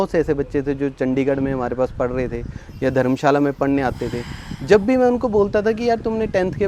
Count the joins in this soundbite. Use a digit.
0